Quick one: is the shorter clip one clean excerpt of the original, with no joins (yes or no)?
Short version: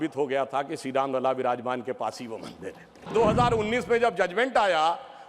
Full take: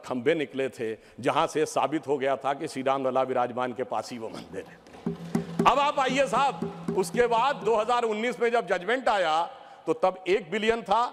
no